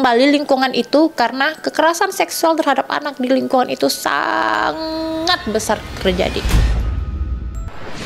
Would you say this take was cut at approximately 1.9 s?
no; 1 cut; at 6.4 s

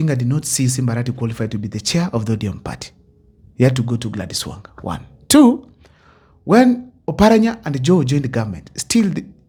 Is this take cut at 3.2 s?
no; 0 cuts

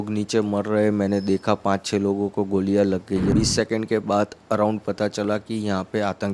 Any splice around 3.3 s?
yes; 1 cut; at 3.3 s

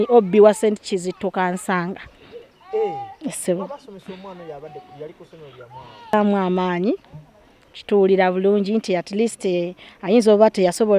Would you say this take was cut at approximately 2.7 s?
no; 1 cut; at 6.1 s

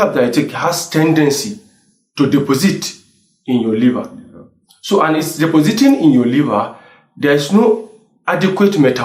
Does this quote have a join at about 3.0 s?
no; 0 cuts

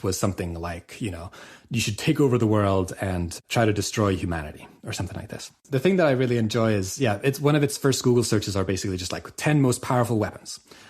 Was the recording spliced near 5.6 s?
yes; 1 cut; at 5.6 s

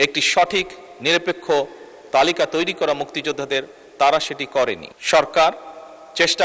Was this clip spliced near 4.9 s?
yes; 1 cut; at 4.9 s

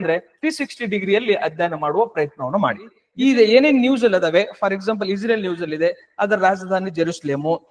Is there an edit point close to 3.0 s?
yes; 1 cut; at 3.0 s

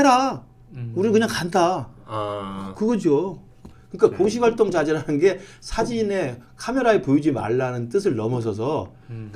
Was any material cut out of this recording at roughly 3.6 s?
yes; 1 cut; at 3.6 s

